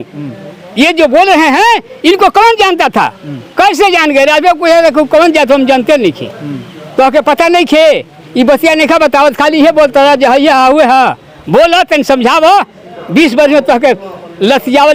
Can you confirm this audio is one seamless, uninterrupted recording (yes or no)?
yes